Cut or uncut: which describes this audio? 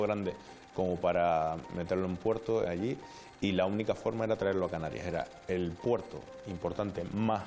uncut